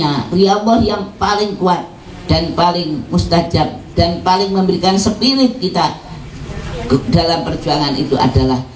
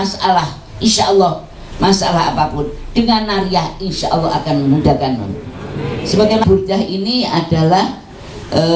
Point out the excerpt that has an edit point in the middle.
second; 1 cut; at 6.4 s

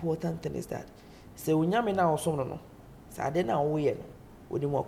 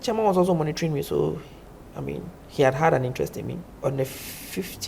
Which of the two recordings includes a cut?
second; 1 cut; at 3.6 s

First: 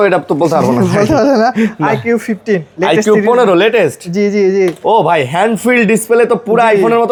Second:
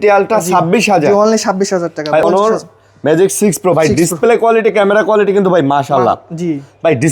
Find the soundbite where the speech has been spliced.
second; 1 cut; at 2.2 s

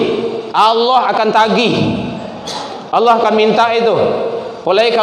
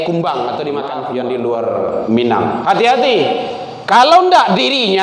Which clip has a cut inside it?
second; 1 cut; at 1.0 s

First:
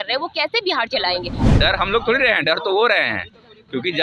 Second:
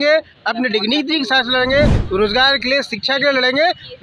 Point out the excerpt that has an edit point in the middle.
first; 1 cut; at 1.5 s

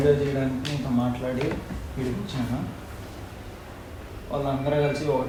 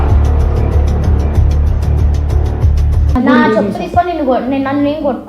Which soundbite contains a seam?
second; 1 cut; at 3.2 s

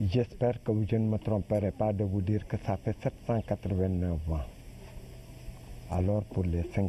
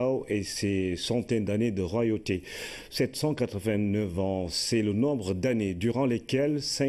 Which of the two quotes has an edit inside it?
first; 1 cut; at 2.0 s

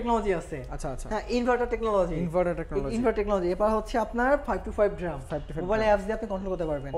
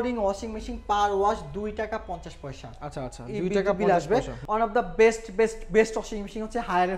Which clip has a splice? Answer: second; 1 cut; at 4.4 s

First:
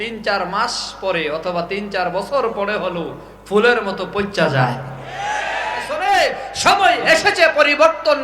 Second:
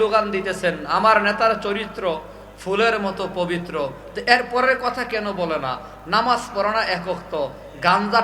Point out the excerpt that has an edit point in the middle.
first; 1 cut; at 5.9 s

